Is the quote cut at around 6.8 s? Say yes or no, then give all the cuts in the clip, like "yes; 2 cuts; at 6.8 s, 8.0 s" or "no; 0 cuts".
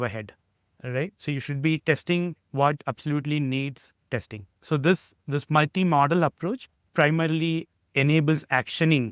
yes; 2 cuts; at 4.6 s, 6.8 s